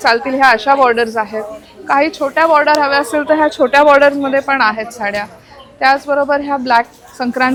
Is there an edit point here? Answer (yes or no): no